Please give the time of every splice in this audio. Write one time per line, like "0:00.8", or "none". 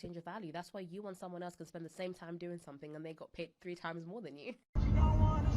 0:04.6